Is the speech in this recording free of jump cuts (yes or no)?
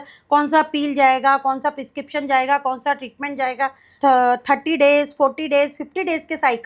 no